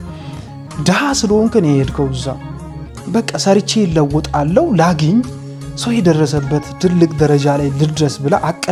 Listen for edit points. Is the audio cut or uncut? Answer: uncut